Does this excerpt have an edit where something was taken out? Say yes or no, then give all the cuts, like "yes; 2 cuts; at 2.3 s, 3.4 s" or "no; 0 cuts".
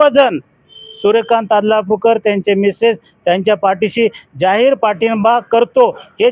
no; 0 cuts